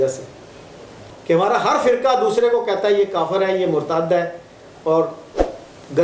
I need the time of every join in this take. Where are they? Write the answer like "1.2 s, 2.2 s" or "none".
1.0 s